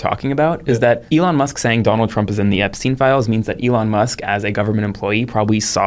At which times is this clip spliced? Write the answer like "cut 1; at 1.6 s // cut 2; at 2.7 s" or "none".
cut 1; at 1.0 s